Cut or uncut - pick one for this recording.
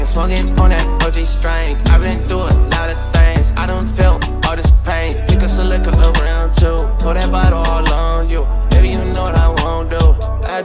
uncut